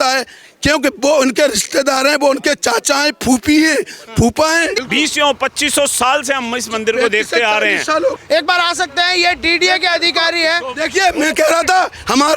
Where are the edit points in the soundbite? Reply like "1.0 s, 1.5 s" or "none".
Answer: 4.8 s, 8.2 s